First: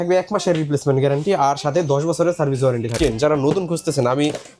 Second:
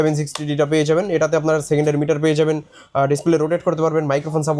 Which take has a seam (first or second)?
first